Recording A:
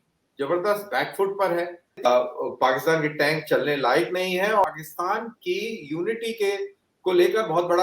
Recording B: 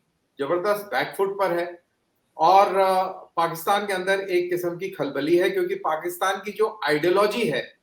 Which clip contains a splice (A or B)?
A